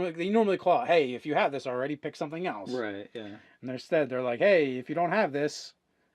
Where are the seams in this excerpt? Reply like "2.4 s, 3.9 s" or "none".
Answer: 4.4 s

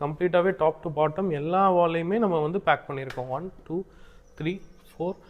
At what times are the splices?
none

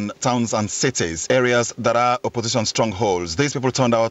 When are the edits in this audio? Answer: 1.2 s

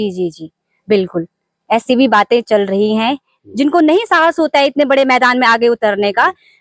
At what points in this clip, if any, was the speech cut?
3.3 s

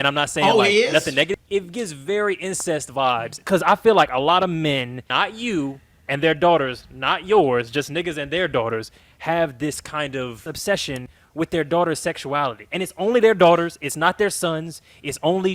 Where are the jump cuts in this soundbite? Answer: 1.3 s, 3.4 s, 5.0 s, 10.5 s

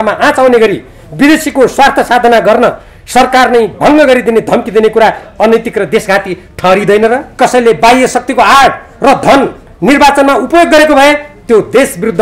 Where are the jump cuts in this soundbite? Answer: 7.4 s

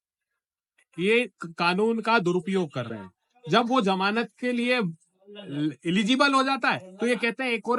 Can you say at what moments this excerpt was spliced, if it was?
none

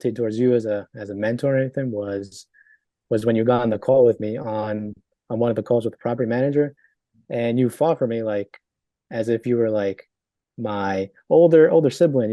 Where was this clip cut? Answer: none

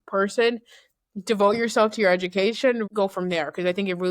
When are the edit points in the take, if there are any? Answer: 2.8 s

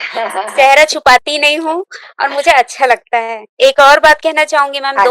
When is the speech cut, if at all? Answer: 3.6 s

